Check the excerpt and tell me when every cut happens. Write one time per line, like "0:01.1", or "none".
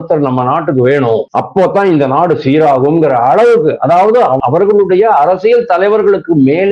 0:01.3
0:04.4